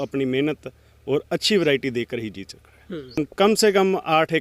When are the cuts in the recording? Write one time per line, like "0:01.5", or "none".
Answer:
0:03.2